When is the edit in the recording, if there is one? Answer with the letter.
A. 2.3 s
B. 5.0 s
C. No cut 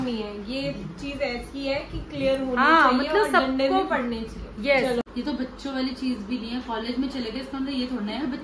B